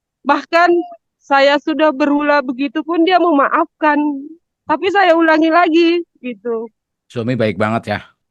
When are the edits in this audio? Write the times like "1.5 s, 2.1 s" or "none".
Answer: none